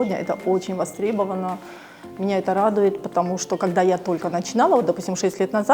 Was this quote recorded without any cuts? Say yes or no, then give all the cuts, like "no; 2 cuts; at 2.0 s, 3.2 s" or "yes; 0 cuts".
yes; 0 cuts